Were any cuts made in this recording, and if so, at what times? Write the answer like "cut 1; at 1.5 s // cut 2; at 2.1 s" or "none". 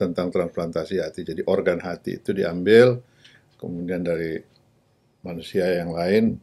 none